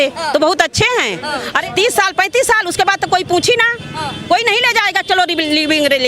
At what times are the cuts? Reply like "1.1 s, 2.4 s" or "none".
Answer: 1.6 s